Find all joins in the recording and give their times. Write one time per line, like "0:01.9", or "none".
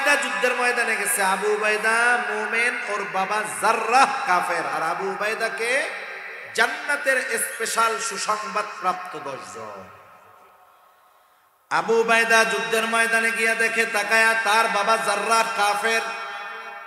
0:11.5